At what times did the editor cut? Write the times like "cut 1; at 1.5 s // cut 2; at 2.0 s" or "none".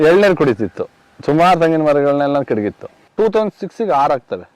cut 1; at 3.0 s